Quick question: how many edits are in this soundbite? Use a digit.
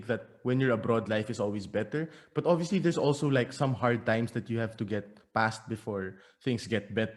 0